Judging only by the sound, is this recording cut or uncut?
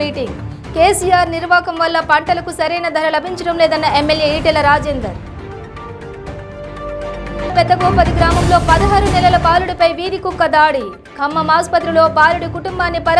uncut